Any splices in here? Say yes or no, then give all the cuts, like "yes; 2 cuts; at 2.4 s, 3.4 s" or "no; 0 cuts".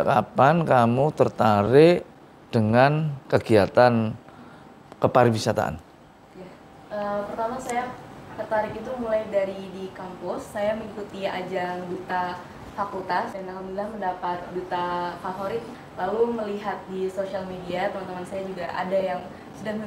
yes; 3 cuts; at 3.2 s, 13.3 s, 15.8 s